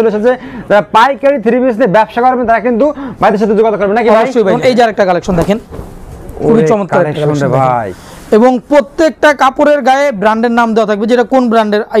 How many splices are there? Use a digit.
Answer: 1